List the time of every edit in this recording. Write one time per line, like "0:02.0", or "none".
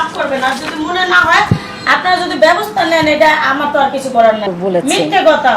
0:04.4

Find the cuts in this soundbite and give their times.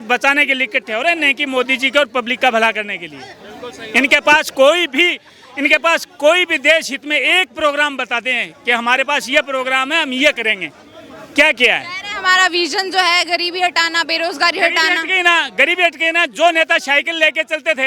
none

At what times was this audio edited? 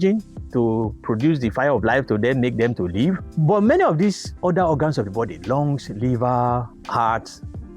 0:03.3
0:06.8

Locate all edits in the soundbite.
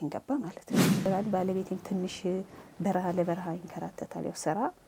0:01.1

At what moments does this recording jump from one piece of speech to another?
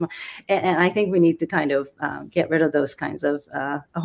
none

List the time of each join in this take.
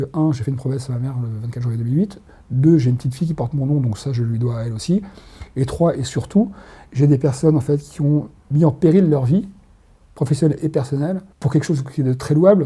0:08.4
0:11.3

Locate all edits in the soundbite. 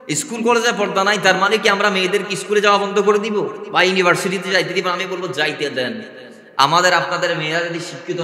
none

